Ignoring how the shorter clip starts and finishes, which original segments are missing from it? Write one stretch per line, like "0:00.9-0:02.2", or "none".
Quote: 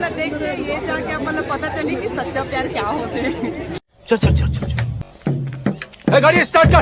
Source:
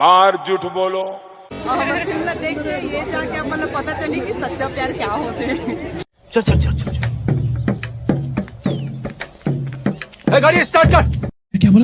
0:07.2-0:09.1